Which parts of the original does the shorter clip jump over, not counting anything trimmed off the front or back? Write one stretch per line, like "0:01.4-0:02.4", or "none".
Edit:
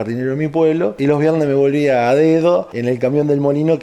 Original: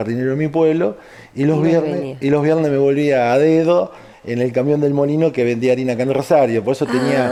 0:00.9-0:02.2
0:04.0-0:04.3